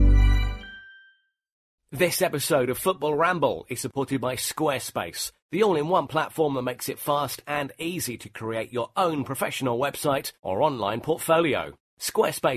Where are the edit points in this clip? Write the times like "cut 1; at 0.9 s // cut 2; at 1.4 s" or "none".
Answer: cut 1; at 1.8 s